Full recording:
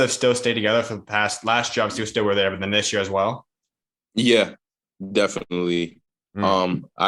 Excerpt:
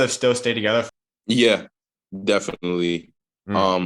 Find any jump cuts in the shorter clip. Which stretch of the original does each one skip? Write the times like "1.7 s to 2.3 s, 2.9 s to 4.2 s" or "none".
1.0 s to 3.9 s